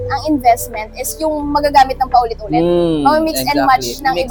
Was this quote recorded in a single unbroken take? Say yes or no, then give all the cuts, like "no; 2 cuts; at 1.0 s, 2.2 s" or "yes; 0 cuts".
yes; 0 cuts